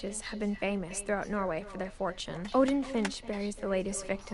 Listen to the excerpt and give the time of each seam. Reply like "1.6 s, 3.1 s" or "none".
2.4 s